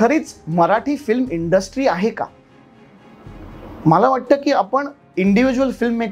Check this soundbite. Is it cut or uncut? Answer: uncut